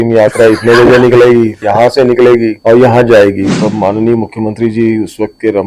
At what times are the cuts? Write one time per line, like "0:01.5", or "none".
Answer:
0:01.6
0:02.6
0:03.5